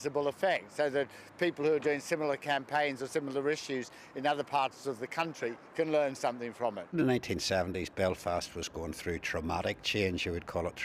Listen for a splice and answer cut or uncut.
cut